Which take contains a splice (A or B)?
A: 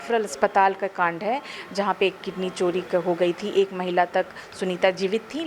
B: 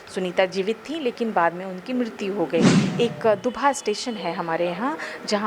B